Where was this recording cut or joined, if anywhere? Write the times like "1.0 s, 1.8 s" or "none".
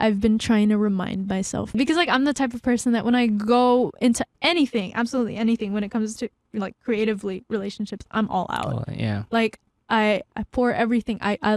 1.8 s